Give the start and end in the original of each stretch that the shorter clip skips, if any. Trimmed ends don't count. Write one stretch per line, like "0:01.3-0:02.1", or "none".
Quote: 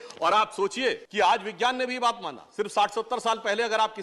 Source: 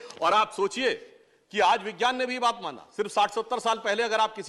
0:01.0-0:01.4

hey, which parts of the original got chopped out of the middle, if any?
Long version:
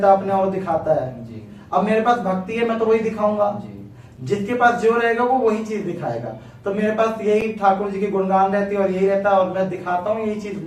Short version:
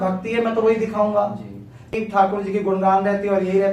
0:04.2-0:07.5

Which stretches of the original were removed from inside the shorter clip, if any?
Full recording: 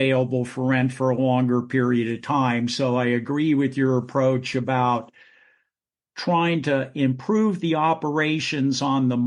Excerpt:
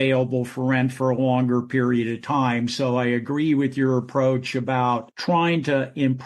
0:05.1-0:06.1

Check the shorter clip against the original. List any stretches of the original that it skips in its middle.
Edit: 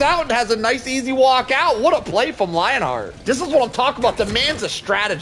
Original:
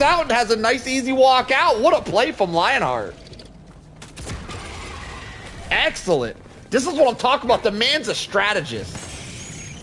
0:03.1-0:06.6

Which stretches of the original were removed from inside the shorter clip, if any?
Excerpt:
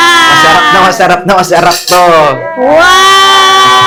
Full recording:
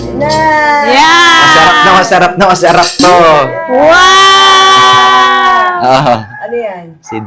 none

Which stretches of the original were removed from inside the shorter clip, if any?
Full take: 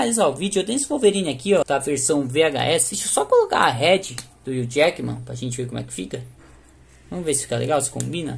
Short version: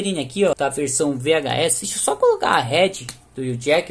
none

